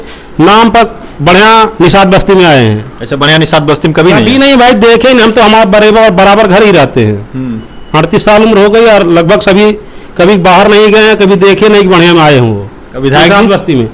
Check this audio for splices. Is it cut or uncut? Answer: uncut